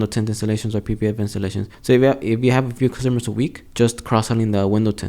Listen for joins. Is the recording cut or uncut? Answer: cut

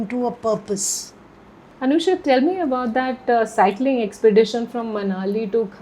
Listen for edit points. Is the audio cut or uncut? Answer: uncut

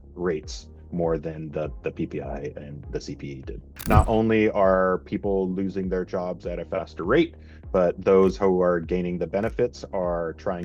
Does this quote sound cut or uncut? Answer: cut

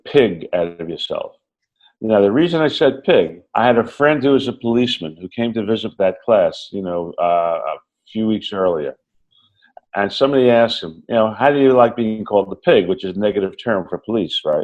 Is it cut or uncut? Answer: cut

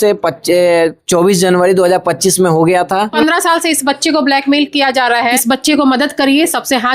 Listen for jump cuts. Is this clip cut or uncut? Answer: cut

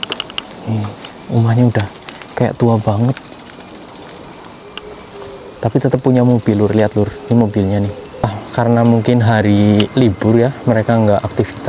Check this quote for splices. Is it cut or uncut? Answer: cut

